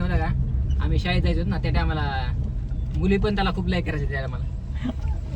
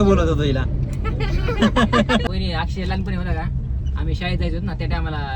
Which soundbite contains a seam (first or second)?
second